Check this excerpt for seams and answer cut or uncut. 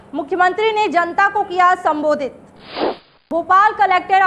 cut